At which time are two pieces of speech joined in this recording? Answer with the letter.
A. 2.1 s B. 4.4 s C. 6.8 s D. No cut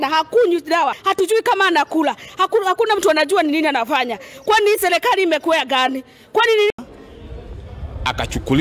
C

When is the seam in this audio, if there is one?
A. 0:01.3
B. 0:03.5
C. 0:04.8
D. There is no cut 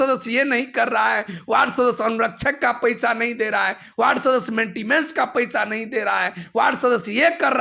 D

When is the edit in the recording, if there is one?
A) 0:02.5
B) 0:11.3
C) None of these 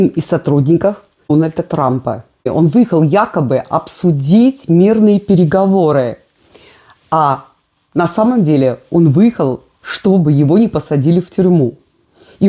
A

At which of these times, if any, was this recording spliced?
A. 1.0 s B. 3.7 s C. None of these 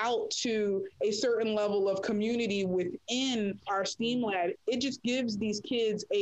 B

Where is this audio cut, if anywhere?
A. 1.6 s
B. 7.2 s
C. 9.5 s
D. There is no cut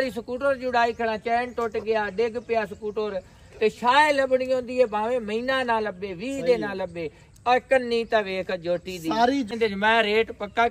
C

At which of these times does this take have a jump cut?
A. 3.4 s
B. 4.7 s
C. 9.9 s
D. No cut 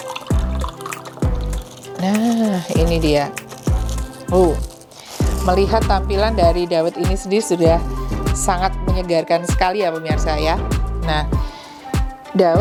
D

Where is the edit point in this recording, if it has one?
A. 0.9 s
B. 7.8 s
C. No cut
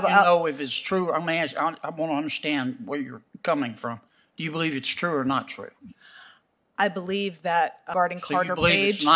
B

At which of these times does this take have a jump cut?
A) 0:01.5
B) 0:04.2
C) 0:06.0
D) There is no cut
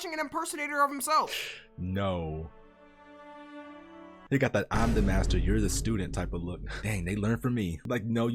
B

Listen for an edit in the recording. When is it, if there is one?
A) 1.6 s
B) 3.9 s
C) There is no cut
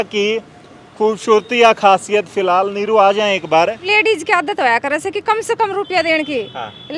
B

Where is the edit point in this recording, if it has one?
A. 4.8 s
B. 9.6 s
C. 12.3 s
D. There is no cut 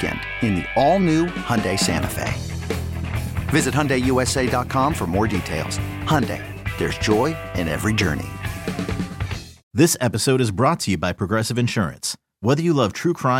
B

